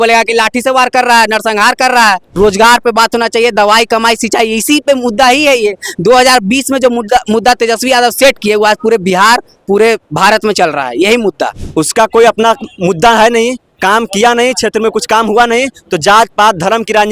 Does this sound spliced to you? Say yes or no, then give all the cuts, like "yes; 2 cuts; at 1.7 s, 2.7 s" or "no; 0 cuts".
yes; 2 cuts; at 2.3 s, 11.6 s